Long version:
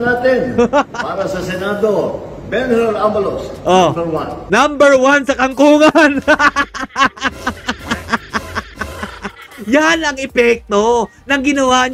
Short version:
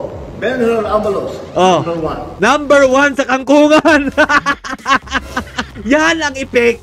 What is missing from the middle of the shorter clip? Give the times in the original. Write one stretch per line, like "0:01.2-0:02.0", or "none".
0:07.7-0:09.5